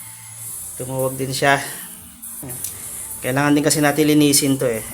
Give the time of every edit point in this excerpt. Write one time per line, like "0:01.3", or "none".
0:02.4